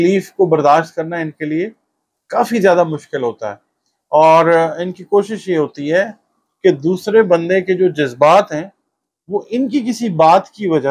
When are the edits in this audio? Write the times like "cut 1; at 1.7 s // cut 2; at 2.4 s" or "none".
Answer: none